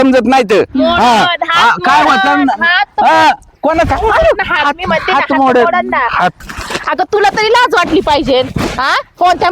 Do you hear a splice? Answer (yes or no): yes